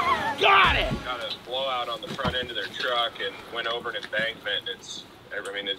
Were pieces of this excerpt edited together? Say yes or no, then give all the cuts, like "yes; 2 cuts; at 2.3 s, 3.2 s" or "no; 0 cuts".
yes; 1 cut; at 1.0 s